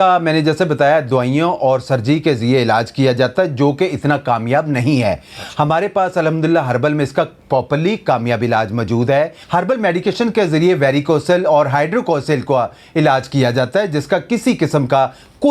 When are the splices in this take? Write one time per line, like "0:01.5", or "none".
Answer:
none